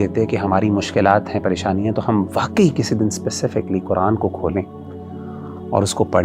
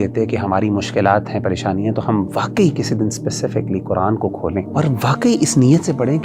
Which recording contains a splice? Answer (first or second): second